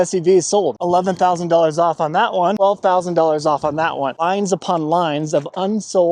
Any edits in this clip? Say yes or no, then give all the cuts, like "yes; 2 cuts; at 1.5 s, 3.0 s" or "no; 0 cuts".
yes; 3 cuts; at 0.8 s, 2.6 s, 4.2 s